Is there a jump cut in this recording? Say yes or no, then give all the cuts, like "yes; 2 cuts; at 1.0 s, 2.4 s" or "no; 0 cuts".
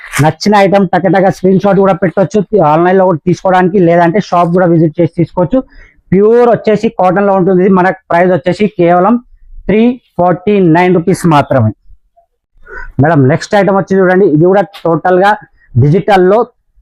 no; 0 cuts